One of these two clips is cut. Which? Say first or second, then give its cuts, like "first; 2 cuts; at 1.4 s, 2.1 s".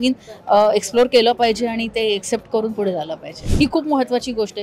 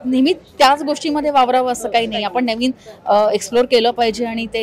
first; 1 cut; at 3.4 s